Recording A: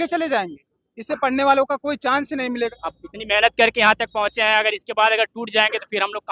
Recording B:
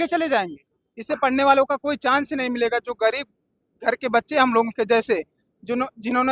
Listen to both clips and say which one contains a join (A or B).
A